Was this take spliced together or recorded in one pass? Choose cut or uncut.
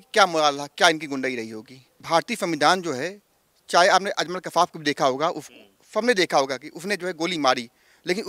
cut